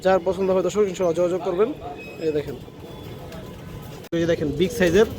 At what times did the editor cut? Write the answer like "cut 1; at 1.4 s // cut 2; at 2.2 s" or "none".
cut 1; at 4.1 s